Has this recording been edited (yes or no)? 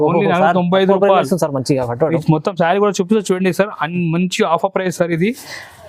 no